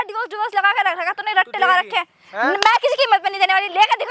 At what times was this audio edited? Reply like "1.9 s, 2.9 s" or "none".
none